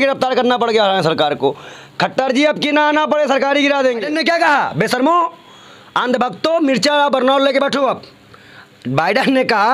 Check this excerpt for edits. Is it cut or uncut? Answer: cut